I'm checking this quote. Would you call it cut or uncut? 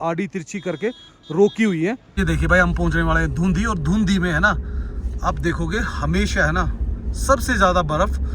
cut